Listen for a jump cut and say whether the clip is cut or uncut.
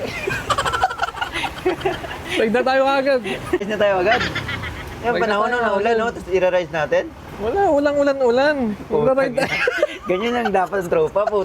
cut